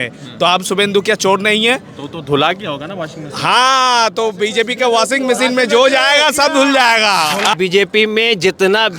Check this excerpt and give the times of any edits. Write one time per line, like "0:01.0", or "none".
0:07.5